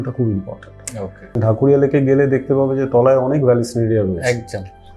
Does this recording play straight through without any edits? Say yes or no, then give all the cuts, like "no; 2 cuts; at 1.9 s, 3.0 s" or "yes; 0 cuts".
no; 1 cut; at 1.4 s